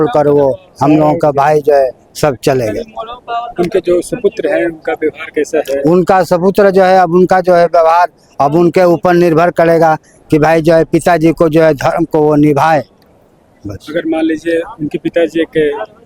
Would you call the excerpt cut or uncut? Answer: uncut